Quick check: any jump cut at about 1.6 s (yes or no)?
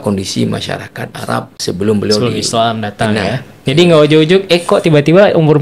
yes